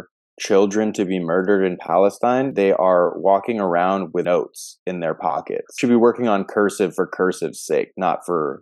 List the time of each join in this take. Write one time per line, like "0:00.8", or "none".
0:02.5
0:04.2
0:05.7